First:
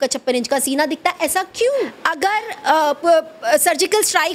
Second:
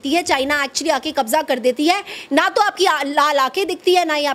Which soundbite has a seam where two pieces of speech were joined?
first; 1 cut; at 2.0 s

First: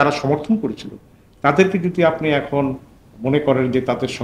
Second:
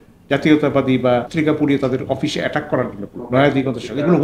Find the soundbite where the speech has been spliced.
second; 2 cuts; at 1.3 s, 3.2 s

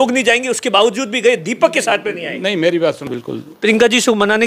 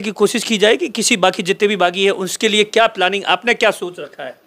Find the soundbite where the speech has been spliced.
first; 1 cut; at 3.1 s

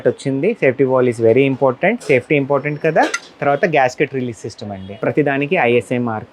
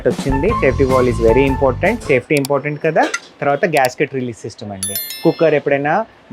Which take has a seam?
first; 1 cut; at 4.8 s

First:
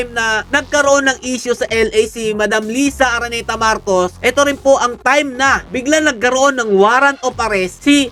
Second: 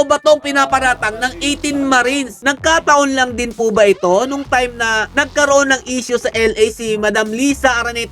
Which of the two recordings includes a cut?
second; 1 cut; at 2.3 s

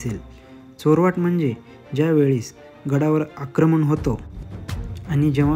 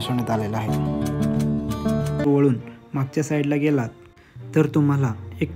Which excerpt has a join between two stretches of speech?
second; 1 cut; at 2.2 s

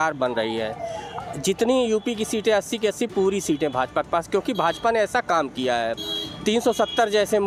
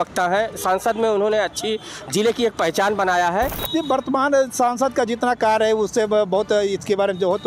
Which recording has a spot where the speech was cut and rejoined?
second; 1 cut; at 3.6 s

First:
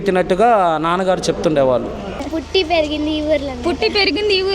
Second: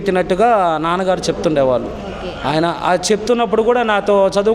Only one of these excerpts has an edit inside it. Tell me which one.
first; 1 cut; at 2.3 s

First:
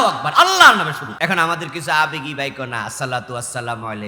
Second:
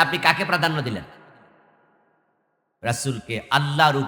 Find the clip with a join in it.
first; 1 cut; at 1.0 s

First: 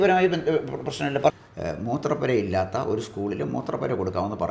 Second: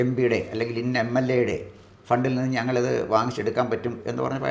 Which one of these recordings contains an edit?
first; 1 cut; at 1.3 s

